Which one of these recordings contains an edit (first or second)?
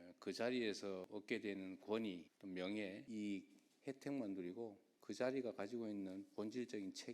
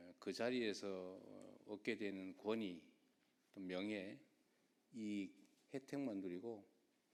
first